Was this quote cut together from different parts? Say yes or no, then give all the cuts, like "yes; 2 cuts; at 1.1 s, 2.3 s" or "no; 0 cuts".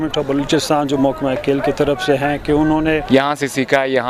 yes; 1 cut; at 3.0 s